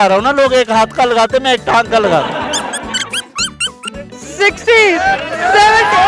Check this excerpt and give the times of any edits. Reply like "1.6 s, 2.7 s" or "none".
2.6 s